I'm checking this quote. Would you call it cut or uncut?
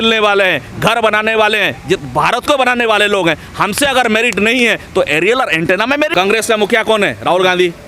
cut